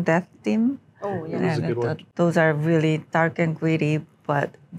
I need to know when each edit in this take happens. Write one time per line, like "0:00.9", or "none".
0:02.0

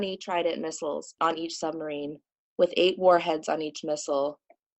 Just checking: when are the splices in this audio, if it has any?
0:01.1

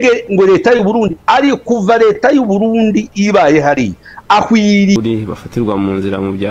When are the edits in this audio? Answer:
0:05.0

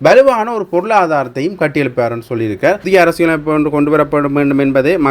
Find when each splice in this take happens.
0:02.8

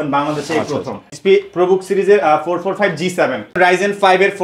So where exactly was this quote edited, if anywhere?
0:01.1
0:03.6

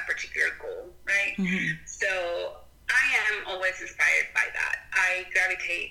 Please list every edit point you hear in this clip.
none

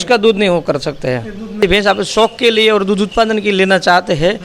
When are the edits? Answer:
0:01.6

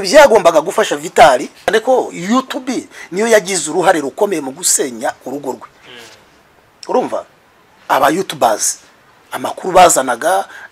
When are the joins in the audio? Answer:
0:01.7

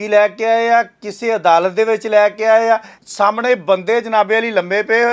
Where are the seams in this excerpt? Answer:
0:03.0

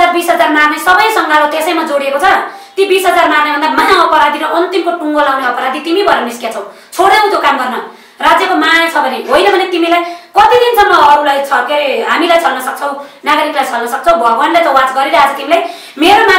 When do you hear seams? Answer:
none

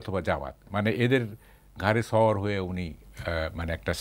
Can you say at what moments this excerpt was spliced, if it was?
none

